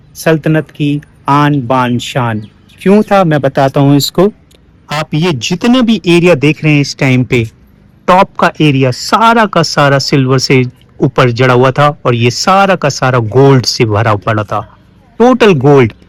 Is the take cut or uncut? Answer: uncut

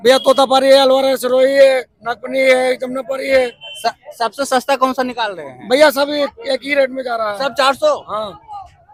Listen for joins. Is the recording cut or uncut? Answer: uncut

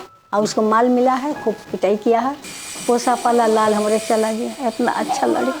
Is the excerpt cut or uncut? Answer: cut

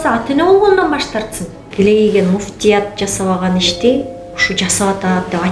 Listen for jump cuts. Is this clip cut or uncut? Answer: cut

